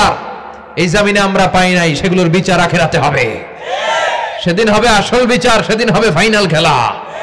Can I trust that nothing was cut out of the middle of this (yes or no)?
yes